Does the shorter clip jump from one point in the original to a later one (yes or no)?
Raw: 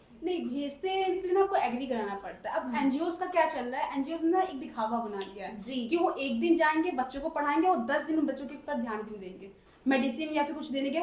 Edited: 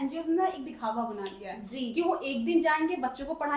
no